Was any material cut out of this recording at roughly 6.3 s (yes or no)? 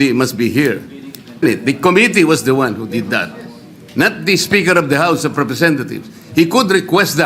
no